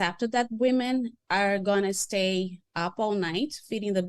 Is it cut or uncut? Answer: cut